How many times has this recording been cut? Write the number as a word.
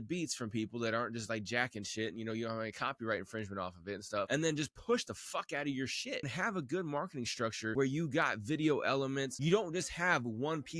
four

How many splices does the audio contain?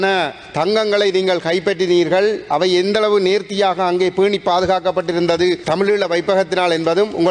one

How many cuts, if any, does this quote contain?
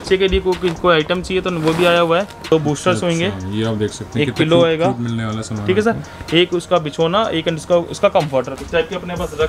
two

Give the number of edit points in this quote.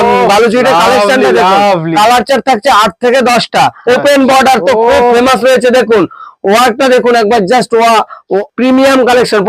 two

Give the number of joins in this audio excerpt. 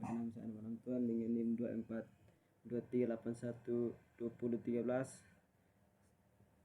one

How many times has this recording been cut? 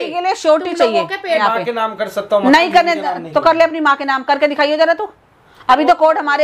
one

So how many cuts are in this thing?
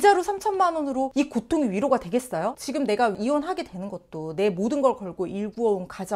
one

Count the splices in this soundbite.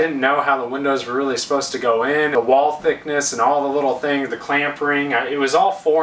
one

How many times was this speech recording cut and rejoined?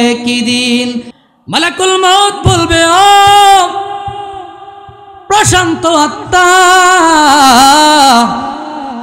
one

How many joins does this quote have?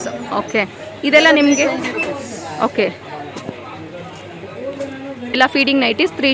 one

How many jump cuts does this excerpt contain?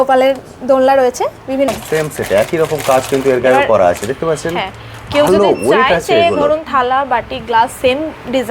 one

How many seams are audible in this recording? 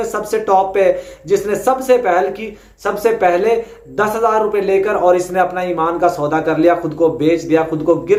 zero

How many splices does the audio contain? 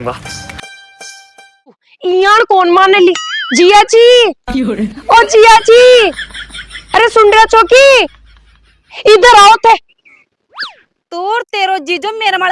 one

